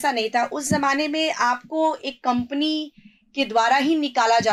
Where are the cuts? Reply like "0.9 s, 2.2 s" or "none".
none